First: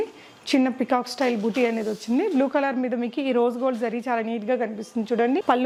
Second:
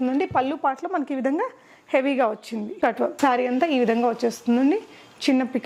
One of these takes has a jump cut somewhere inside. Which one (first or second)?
second